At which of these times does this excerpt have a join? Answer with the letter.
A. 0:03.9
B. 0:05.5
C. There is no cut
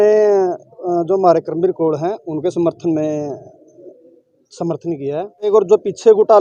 B